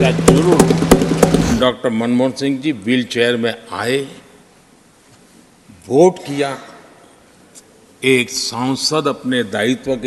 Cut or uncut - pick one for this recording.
cut